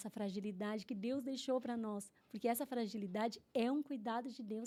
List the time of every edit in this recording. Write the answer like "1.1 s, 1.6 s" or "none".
none